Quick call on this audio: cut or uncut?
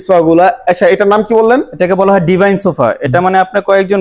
uncut